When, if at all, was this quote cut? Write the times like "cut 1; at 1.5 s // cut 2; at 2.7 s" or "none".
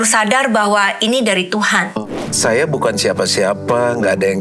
cut 1; at 1.9 s